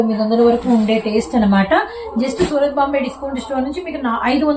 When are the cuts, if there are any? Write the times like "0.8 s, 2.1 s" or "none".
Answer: none